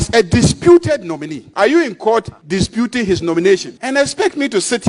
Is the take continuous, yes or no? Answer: no